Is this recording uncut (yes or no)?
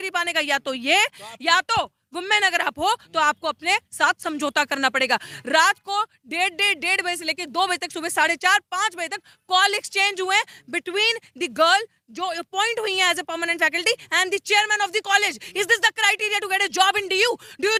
yes